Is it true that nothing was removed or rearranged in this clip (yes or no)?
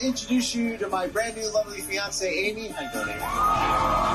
yes